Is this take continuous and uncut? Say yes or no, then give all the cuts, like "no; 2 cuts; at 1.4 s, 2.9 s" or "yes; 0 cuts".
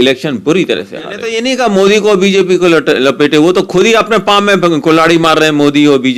no; 1 cut; at 1.2 s